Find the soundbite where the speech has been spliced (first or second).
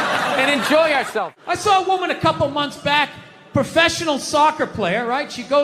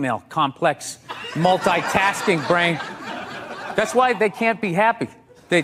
first